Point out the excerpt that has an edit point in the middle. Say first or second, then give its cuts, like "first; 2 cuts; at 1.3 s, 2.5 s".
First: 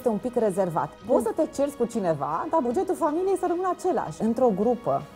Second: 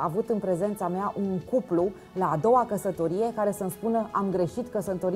first; 2 cuts; at 1.0 s, 4.2 s